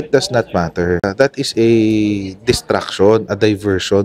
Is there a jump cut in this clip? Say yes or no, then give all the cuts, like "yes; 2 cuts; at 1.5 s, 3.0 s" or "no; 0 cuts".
yes; 1 cut; at 1.1 s